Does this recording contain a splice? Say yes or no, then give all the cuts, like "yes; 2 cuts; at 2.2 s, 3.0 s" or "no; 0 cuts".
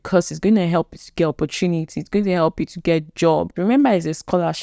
yes; 1 cut; at 3.5 s